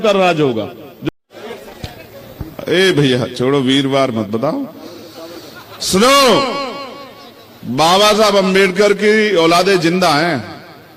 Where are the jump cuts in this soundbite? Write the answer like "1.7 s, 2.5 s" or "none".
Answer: 0.9 s